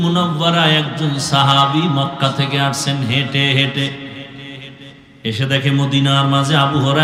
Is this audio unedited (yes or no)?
yes